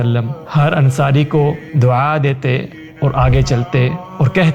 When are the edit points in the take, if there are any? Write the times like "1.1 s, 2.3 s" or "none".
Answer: none